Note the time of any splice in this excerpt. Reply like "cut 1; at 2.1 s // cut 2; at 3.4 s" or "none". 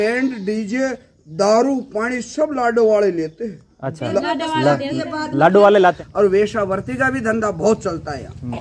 cut 1; at 6.0 s